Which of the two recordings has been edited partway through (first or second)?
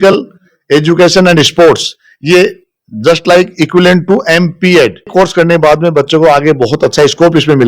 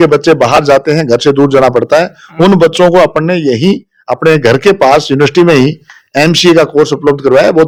first